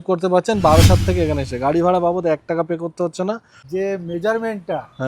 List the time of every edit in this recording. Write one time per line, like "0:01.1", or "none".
0:03.5